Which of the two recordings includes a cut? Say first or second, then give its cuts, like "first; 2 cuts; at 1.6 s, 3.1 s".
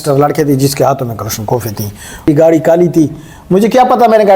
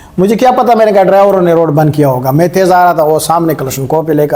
first; 1 cut; at 2.2 s